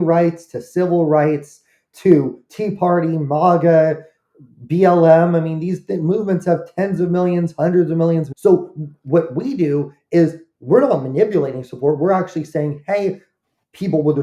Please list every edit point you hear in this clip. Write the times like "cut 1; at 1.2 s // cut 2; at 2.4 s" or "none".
cut 1; at 8.3 s